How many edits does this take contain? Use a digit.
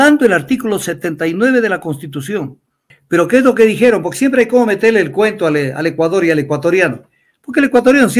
1